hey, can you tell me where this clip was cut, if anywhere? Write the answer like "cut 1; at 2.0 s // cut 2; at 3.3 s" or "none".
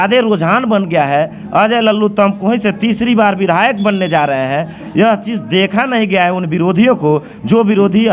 none

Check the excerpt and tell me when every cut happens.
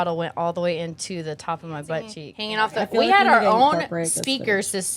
cut 1; at 2.3 s

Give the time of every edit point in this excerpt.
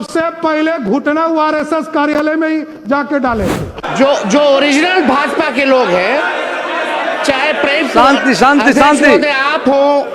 cut 1; at 3.8 s

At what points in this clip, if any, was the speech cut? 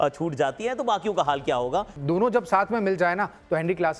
cut 1; at 1.9 s

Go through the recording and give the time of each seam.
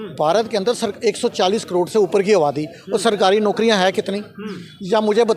none

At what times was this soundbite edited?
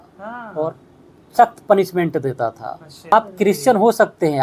cut 1; at 3.1 s

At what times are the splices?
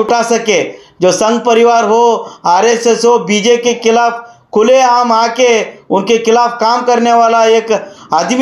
none

